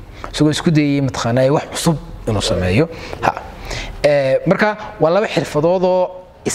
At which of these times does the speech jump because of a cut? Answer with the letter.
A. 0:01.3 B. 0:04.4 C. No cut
C